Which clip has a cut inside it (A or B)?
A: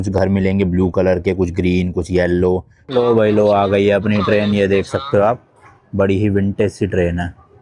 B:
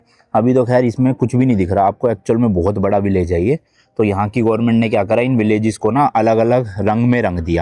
A